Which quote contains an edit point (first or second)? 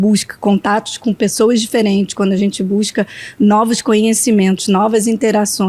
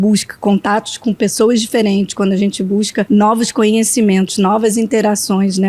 second